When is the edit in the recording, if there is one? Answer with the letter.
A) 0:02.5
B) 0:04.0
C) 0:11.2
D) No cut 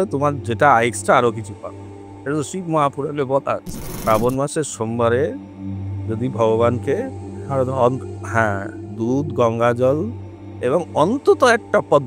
B